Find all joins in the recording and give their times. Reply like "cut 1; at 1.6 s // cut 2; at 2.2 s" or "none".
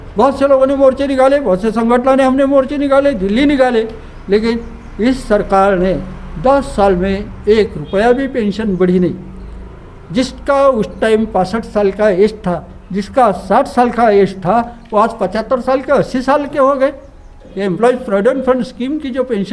cut 1; at 17.5 s